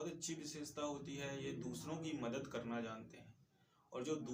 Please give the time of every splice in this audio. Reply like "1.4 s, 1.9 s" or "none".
none